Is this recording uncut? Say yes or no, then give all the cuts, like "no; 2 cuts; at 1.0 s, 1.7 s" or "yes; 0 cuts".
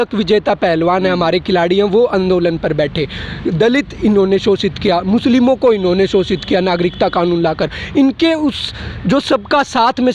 yes; 0 cuts